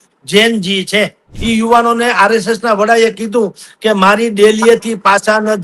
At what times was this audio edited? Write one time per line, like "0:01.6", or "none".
0:01.3